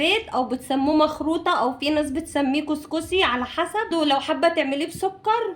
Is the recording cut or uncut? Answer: cut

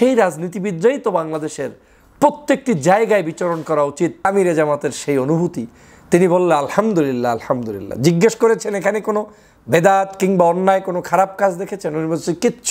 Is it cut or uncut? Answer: cut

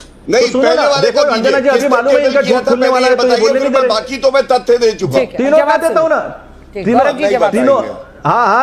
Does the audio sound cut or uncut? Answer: uncut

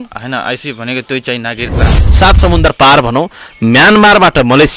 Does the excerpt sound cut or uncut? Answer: cut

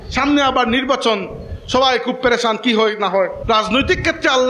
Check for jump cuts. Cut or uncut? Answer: cut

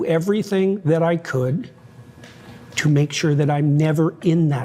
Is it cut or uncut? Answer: uncut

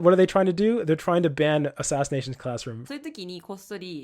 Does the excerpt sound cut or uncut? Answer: cut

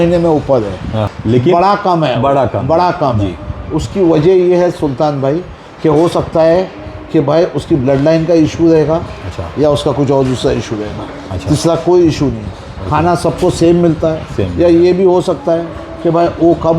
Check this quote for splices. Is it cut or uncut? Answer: cut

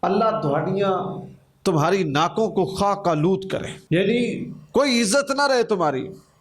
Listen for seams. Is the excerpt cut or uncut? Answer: cut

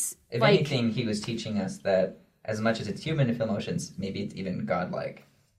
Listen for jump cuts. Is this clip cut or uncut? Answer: uncut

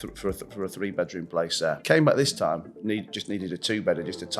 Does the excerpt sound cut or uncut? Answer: cut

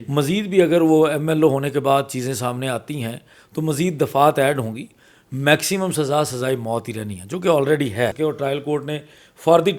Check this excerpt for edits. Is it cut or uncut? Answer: cut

